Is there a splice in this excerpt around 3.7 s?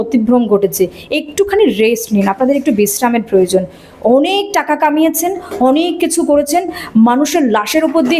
no; 0 cuts

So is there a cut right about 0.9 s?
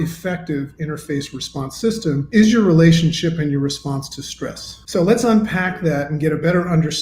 no; 2 cuts; at 2.2 s, 4.7 s

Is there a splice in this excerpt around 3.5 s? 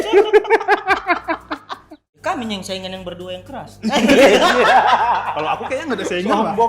no; 1 cut; at 2.1 s

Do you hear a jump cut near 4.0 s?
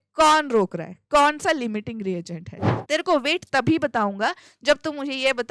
no; 1 cut; at 2.8 s

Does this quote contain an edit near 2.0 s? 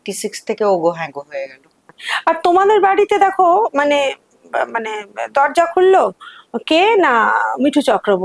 yes; 1 cut; at 2.0 s

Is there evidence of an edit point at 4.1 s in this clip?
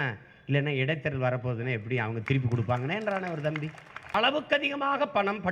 yes; 1 cut; at 4.1 s

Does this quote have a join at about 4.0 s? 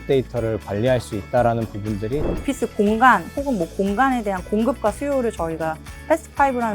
no; 1 cut; at 2.3 s

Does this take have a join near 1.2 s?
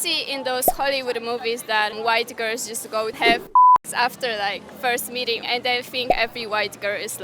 no; 2 cuts; at 3.2 s, 5.4 s

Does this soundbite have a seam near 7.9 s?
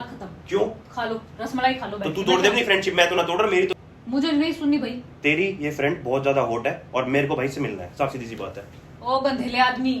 no; 1 cut; at 3.7 s

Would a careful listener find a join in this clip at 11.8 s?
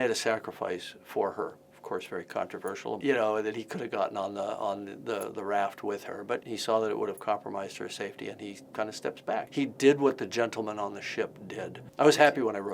yes; 1 cut; at 11.8 s

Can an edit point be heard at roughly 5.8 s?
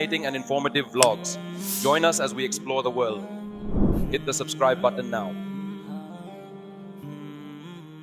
no; 0 cuts

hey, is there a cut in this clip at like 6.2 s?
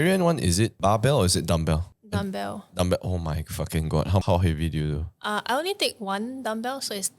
no; 3 cuts; at 0.8 s, 1.9 s, 4.2 s

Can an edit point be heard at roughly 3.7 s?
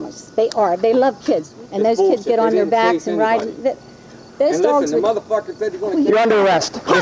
no; 1 cut; at 1.5 s

